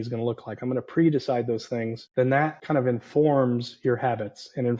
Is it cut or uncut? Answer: cut